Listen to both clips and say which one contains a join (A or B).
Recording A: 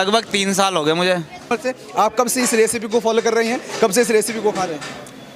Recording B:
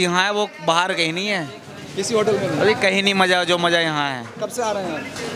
A